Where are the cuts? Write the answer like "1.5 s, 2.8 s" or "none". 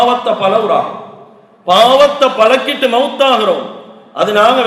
none